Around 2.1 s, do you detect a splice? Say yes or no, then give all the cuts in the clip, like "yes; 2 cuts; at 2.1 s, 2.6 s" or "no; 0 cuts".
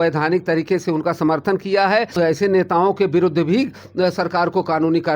yes; 1 cut; at 2.1 s